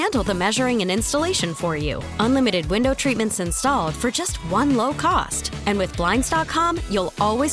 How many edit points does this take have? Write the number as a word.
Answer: zero